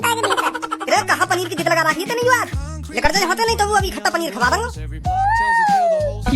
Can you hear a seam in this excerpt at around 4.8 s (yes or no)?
yes